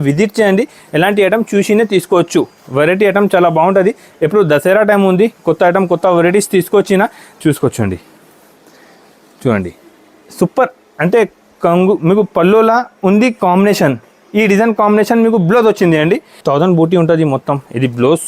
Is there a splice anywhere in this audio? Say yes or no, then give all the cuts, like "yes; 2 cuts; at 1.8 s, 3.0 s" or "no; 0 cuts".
yes; 2 cuts; at 7.2 s, 16.3 s